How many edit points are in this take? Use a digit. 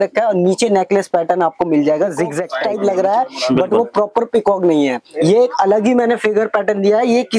1